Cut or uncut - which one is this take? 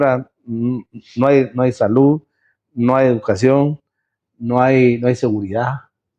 uncut